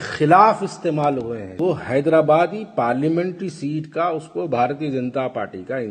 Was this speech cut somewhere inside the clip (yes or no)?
yes